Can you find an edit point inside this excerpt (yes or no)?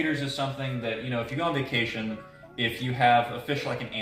no